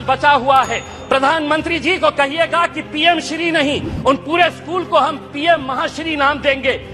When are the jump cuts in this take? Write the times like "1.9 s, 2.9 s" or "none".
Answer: 0.9 s